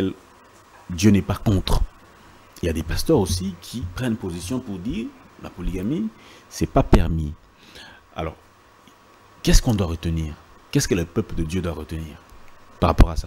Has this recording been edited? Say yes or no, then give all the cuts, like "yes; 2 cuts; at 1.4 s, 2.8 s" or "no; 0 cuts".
no; 0 cuts